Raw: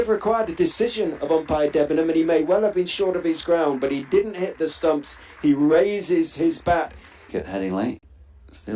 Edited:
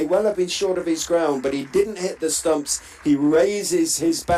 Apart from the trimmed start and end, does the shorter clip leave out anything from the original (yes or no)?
no